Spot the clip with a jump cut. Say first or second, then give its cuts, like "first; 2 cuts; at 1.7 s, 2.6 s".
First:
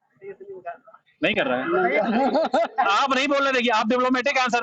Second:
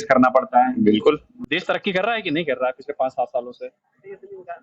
second; 1 cut; at 1.3 s